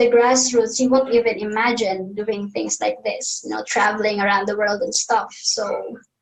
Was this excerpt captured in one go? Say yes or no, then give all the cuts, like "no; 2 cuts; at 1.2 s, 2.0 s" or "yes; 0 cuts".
yes; 0 cuts